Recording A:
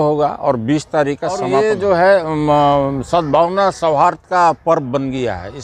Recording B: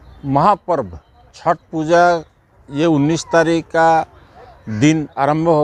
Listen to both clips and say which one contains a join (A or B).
A